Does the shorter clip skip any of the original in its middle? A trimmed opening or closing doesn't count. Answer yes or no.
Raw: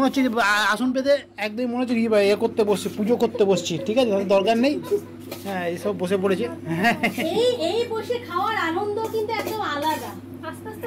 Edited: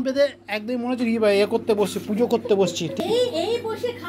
yes